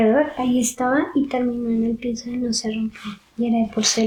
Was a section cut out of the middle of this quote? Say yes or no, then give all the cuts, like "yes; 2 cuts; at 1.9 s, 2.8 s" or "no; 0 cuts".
no; 0 cuts